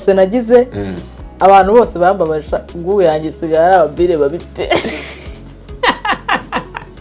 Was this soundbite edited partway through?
no; 0 cuts

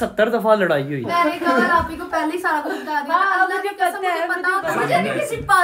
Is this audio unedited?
no; 2 cuts; at 1.1 s, 4.7 s

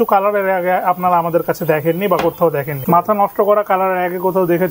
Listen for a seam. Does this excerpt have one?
yes; 1 cut; at 2.7 s

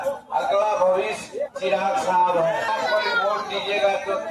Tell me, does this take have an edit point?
yes; 1 cut; at 2.7 s

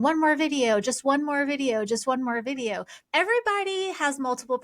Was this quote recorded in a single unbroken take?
no; 1 cut; at 2.9 s

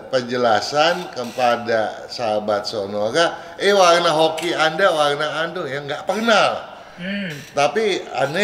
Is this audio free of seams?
yes; 0 cuts

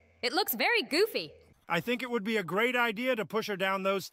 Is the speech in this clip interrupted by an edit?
yes; 1 cut; at 1.5 s

